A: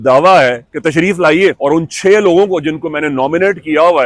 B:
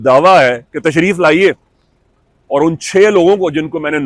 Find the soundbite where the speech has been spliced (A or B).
A